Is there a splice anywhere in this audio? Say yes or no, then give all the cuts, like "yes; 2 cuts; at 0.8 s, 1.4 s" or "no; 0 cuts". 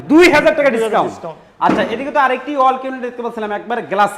no; 0 cuts